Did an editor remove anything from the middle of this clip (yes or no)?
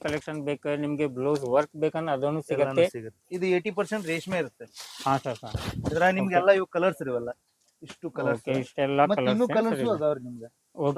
yes